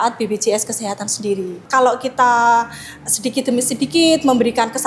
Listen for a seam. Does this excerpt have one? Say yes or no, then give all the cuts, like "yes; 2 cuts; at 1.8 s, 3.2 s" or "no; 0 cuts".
yes; 1 cut; at 1.6 s